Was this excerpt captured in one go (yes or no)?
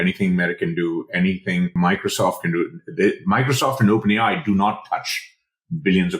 no